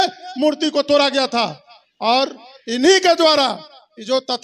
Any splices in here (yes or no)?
no